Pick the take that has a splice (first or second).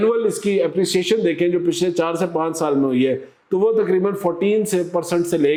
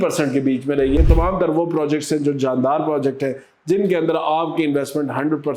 second